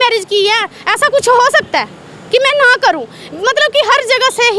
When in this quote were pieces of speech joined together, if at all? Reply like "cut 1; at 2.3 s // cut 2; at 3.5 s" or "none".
none